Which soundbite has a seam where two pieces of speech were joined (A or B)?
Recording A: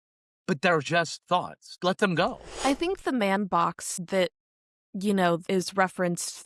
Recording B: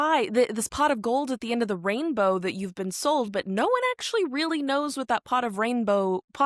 A